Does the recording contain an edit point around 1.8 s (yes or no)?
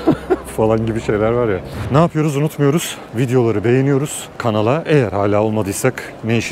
yes